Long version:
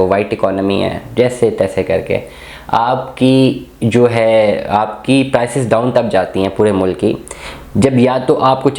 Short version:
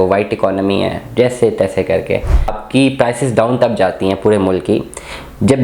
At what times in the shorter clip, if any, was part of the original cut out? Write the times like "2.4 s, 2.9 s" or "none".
2.6 s